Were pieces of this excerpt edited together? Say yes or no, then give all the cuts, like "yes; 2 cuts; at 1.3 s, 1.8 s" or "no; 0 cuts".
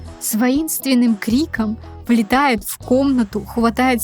yes; 1 cut; at 1.9 s